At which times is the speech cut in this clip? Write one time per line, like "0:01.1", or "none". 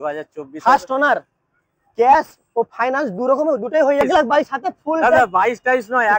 0:04.0